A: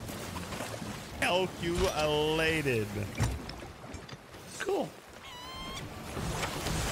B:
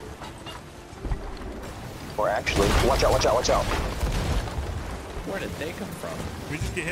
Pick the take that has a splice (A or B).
A